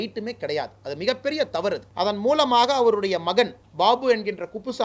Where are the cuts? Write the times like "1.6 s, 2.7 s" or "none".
1.9 s